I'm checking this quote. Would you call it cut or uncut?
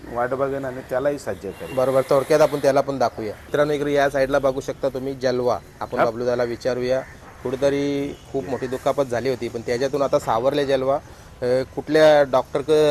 uncut